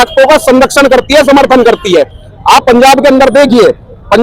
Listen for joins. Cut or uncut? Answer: uncut